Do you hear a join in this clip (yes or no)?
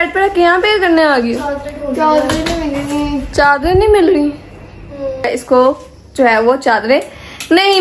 yes